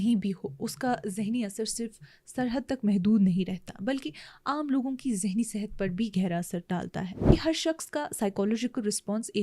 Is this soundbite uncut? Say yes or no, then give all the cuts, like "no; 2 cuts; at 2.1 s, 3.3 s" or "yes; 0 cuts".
no; 1 cut; at 7.1 s